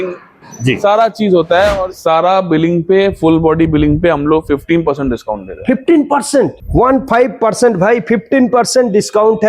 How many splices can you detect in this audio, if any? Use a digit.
1